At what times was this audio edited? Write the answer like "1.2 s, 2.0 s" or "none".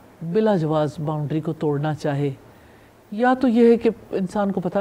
none